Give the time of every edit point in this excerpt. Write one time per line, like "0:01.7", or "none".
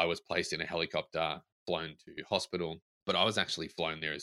0:02.9